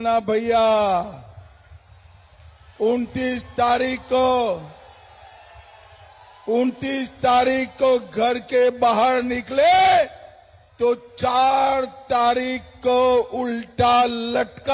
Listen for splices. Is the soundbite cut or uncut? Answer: uncut